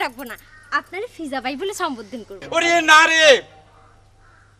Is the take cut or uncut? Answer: cut